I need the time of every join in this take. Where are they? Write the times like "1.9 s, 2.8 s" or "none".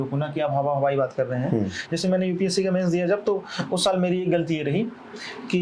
none